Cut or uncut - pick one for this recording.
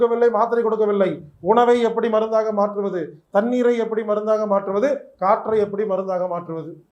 uncut